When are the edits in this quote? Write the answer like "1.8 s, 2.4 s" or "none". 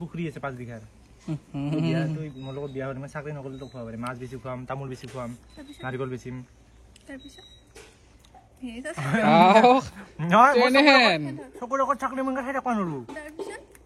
none